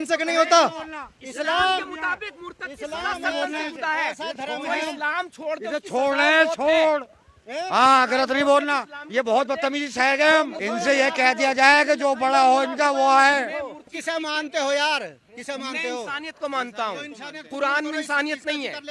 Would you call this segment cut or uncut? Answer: cut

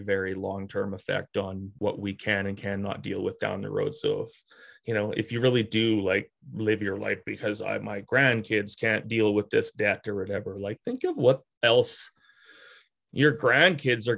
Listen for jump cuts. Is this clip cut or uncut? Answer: cut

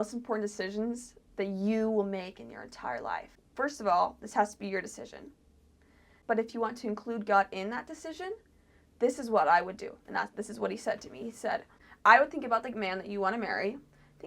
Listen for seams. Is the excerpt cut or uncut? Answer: cut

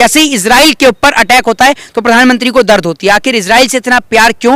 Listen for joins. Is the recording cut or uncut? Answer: uncut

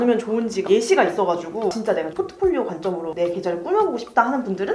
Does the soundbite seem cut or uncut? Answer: uncut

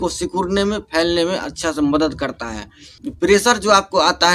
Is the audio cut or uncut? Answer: uncut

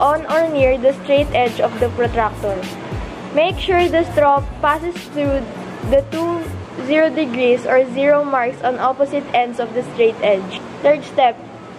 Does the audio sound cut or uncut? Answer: cut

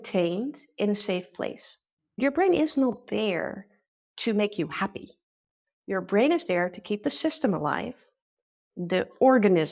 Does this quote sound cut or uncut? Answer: cut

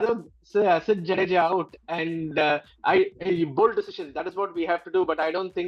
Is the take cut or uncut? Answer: uncut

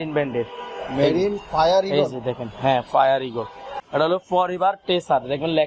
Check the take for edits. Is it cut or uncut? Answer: cut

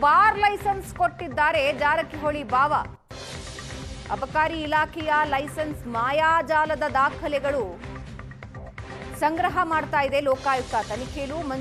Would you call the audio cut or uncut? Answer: uncut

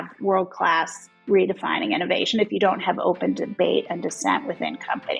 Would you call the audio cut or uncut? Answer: uncut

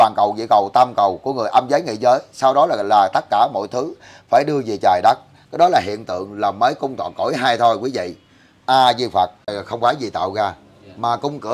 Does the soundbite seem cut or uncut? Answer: cut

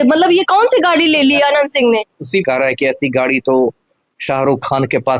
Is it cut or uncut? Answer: cut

